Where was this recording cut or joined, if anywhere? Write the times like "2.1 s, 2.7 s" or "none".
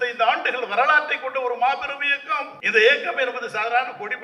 2.6 s